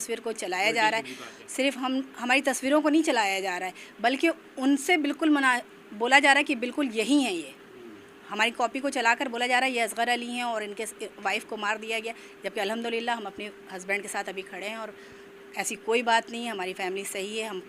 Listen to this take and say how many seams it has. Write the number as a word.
zero